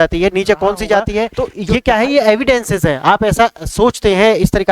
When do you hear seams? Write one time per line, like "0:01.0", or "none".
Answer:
0:01.5